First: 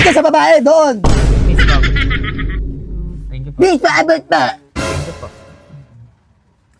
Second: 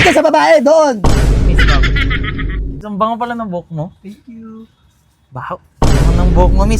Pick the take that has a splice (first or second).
second